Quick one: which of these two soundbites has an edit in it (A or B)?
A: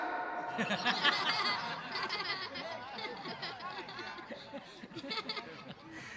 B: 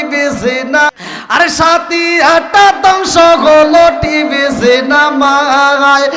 B